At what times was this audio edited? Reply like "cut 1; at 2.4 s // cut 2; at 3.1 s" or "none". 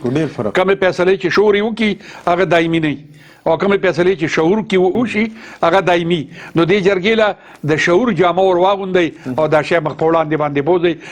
cut 1; at 1.3 s // cut 2; at 5.0 s